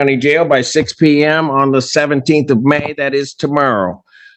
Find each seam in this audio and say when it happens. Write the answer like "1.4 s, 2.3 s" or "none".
none